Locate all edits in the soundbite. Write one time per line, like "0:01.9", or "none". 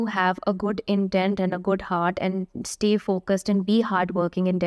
none